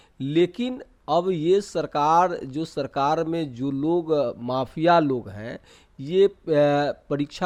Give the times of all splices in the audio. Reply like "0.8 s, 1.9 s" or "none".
none